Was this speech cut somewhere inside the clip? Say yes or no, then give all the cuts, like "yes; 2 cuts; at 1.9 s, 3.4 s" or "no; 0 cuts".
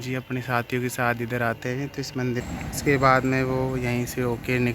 yes; 1 cut; at 2.4 s